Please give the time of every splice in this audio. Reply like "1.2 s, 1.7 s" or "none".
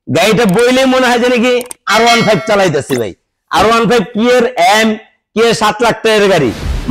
none